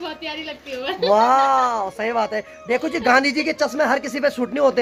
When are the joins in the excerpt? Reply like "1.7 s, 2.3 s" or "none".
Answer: none